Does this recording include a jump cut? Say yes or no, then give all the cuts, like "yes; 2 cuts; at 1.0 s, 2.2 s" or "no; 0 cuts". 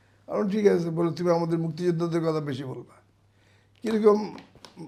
no; 0 cuts